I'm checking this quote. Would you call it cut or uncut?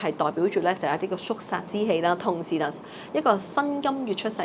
uncut